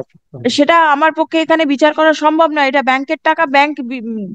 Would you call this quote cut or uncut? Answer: uncut